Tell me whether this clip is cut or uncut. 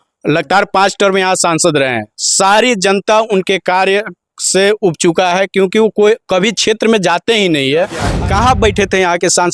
cut